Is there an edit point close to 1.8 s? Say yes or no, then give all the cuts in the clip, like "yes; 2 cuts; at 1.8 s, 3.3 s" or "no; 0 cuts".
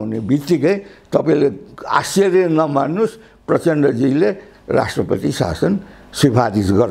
no; 0 cuts